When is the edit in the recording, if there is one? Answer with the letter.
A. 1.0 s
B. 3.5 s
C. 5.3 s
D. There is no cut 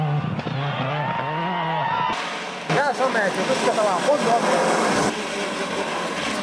A